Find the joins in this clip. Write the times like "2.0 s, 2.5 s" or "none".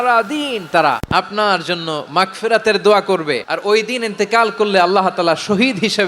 1.0 s, 3.5 s